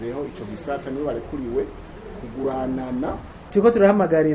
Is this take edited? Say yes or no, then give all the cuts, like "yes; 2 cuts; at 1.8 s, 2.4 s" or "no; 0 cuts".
yes; 1 cut; at 3.3 s